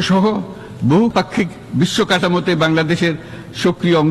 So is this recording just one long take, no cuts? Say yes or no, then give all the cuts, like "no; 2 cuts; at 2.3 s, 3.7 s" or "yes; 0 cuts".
no; 1 cut; at 1.1 s